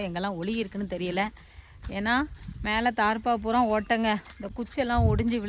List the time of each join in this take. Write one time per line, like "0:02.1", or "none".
0:04.5